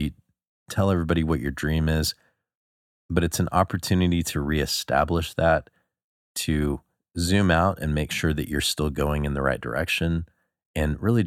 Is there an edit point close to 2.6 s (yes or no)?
no